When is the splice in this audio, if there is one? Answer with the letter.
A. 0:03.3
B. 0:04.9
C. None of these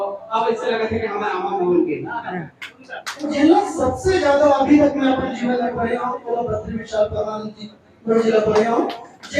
A